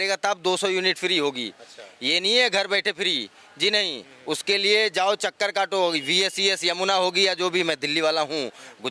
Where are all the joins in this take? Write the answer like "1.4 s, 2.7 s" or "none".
none

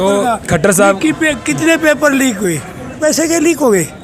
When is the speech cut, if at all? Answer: 3.0 s

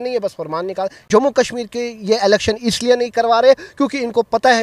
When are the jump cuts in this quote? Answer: 1.0 s

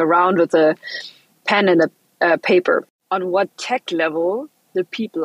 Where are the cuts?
3.0 s

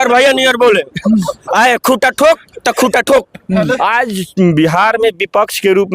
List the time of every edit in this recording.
3.8 s

